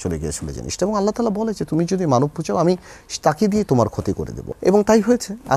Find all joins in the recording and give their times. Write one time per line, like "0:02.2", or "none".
0:04.3